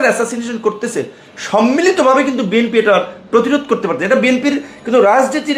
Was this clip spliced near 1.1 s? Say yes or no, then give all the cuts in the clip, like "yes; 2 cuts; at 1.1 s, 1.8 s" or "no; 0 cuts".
no; 0 cuts